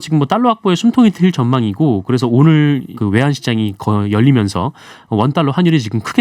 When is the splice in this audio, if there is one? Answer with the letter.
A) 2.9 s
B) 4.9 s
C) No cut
A